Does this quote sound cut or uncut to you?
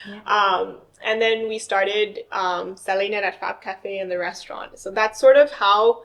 uncut